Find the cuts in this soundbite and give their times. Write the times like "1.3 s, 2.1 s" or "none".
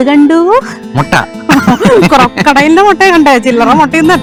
none